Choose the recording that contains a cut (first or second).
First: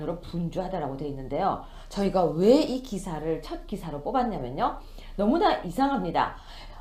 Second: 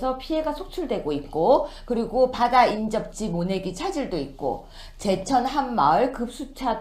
second